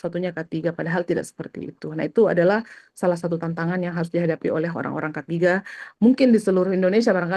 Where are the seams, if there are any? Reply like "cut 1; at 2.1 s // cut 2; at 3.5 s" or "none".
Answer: none